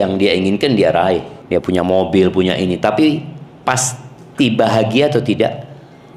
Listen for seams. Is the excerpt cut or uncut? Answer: cut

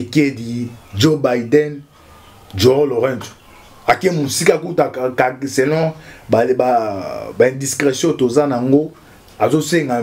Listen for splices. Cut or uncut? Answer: uncut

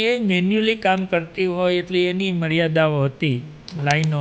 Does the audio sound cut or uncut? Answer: uncut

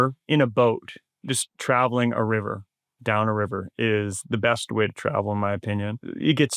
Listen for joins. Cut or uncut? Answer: uncut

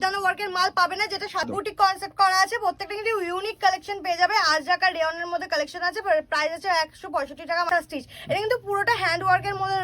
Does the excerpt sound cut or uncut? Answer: cut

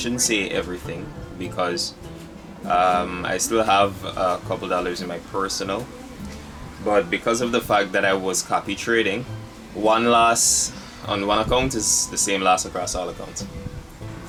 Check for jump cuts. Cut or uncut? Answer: uncut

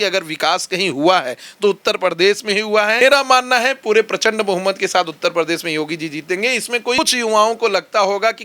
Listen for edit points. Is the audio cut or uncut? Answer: cut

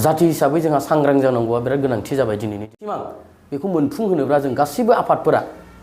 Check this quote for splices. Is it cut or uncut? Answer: cut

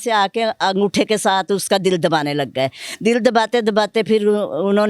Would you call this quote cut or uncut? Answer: uncut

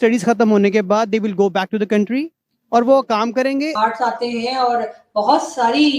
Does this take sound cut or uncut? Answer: cut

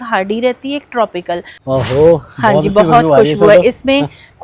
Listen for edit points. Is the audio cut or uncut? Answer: cut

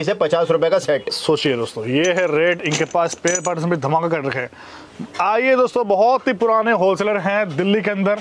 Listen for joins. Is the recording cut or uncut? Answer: uncut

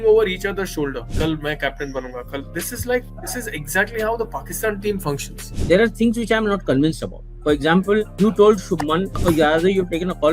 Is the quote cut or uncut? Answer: cut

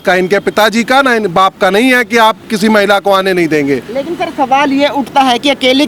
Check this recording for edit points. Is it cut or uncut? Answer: uncut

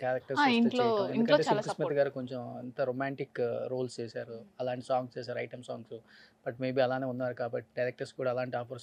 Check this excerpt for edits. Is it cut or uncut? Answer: uncut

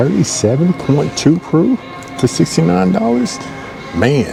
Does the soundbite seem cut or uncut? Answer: uncut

